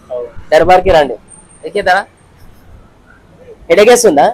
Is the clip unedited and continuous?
yes; 0 cuts

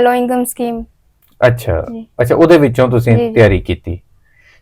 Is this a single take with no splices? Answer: yes; 0 cuts

